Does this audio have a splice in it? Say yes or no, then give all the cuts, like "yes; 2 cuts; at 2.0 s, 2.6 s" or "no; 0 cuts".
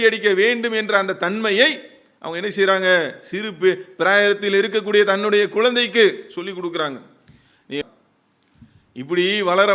yes; 1 cut; at 7.8 s